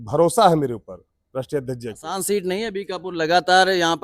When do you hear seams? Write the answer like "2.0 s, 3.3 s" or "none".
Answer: 2.0 s